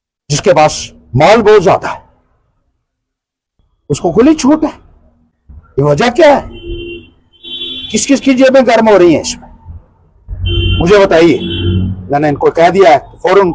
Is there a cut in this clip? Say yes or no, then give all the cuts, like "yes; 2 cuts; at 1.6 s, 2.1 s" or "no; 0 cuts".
no; 0 cuts